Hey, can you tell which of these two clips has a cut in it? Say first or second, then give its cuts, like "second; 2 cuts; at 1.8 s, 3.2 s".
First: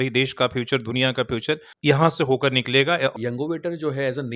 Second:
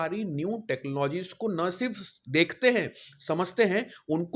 first; 2 cuts; at 1.7 s, 3.1 s